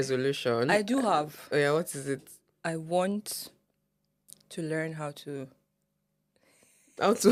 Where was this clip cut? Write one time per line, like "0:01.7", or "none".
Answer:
none